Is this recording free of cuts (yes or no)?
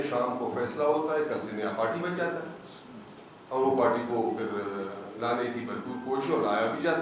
yes